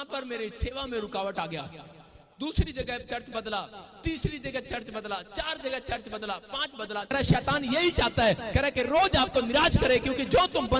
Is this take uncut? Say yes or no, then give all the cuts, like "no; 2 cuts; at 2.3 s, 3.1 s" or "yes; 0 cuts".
no; 1 cut; at 7.1 s